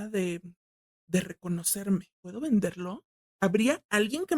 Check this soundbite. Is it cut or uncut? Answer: cut